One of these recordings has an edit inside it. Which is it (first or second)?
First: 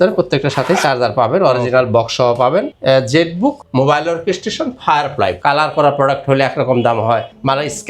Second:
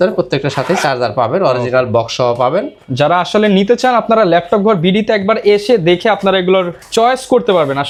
first